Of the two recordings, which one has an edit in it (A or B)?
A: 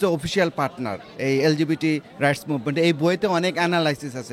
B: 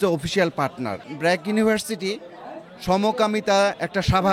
B